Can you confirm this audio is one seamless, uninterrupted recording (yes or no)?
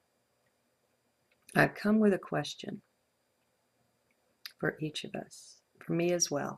yes